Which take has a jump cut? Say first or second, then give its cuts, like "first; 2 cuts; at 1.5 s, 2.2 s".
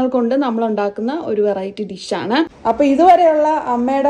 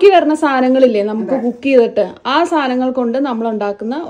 first; 1 cut; at 2.5 s